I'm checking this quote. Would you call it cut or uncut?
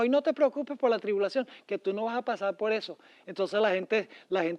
uncut